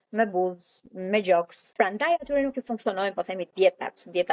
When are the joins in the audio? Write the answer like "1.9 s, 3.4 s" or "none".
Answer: 1.6 s